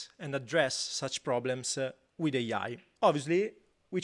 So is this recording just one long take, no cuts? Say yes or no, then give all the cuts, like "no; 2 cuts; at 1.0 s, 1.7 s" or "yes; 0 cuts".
no; 1 cut; at 2.8 s